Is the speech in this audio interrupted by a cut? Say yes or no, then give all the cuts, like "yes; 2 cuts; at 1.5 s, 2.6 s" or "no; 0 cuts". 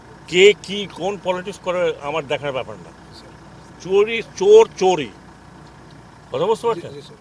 no; 0 cuts